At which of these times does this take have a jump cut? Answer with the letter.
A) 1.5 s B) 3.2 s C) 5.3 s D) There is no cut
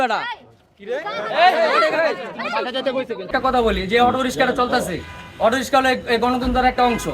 B